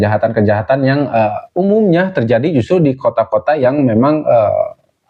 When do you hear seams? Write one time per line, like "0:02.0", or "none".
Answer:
none